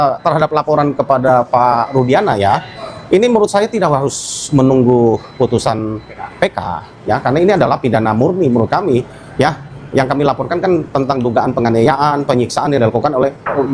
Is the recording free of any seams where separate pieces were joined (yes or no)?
yes